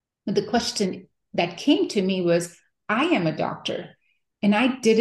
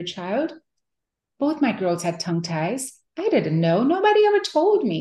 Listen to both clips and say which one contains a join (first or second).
second